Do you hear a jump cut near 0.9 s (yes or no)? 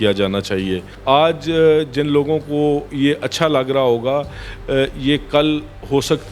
yes